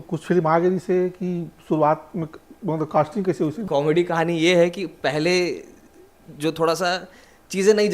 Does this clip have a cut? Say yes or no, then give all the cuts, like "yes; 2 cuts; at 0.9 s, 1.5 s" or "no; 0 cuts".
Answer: yes; 1 cut; at 3.6 s